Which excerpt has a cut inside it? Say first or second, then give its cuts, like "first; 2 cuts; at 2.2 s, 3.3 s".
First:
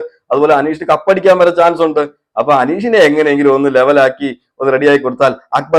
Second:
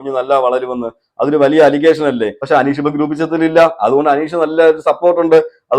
second; 1 cut; at 2.3 s